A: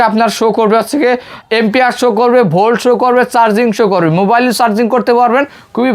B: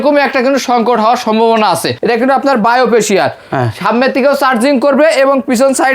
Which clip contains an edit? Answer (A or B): B